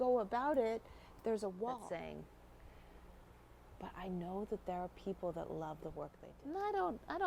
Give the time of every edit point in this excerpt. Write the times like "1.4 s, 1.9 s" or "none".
1.8 s, 6.3 s